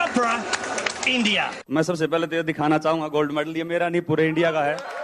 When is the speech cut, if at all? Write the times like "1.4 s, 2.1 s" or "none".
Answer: 1.6 s

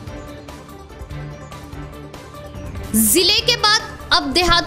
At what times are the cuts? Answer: 0.7 s, 2.6 s

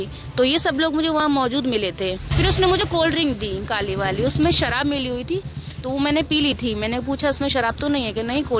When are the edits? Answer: 2.3 s

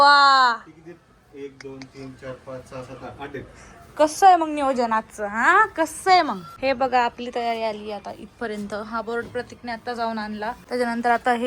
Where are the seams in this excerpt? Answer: 6.5 s, 10.6 s

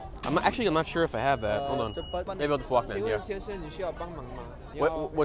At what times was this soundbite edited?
2.3 s

